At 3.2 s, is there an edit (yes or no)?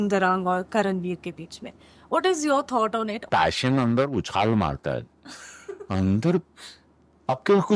yes